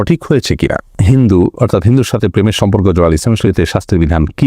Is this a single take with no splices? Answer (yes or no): no